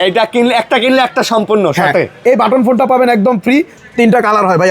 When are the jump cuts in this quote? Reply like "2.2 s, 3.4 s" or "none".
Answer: 3.8 s